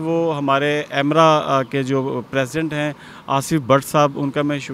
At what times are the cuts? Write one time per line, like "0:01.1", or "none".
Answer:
none

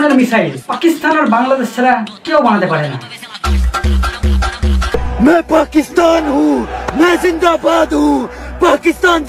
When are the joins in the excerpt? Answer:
0:05.0

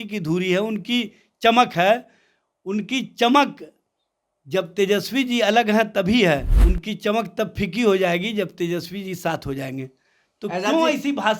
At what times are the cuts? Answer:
0:06.6

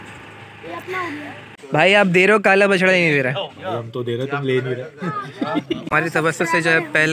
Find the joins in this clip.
0:01.6
0:05.9

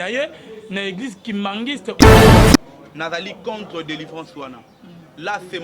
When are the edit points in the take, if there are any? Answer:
0:02.6

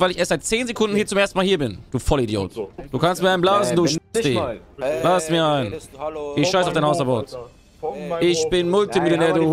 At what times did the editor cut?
0:02.7
0:04.6

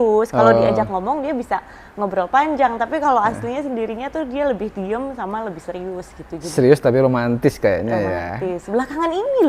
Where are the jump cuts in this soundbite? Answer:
none

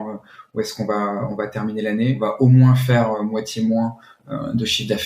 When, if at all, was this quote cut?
0:02.2

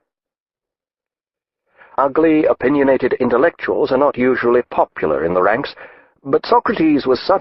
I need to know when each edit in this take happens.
none

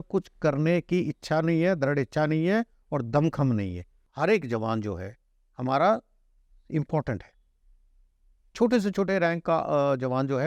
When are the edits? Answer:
0:04.0

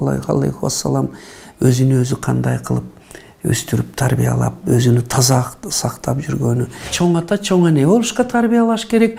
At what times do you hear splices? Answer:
0:06.9

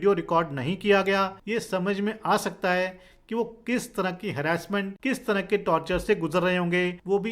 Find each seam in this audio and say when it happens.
0:01.4

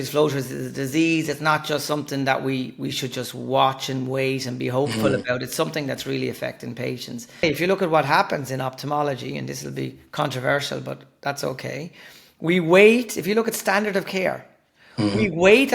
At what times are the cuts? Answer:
0:07.4

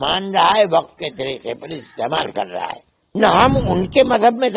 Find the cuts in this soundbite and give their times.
0:03.0

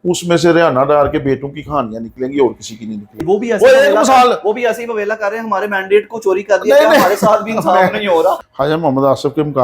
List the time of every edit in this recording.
0:03.2
0:08.5

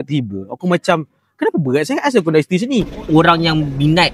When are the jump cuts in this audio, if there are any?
0:03.0

